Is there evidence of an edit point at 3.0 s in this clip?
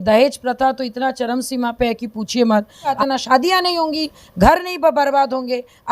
yes; 1 cut; at 3.0 s

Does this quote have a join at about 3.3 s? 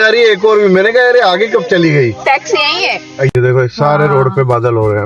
yes; 1 cut; at 3.3 s

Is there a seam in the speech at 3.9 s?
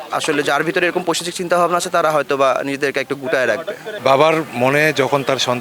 yes; 1 cut; at 3.9 s

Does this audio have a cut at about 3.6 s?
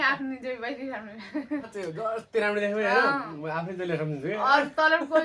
no; 1 cut; at 1.7 s

